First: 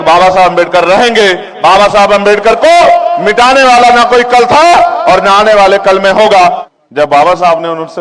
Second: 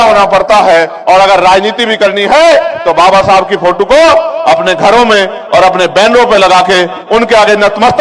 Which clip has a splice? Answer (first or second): first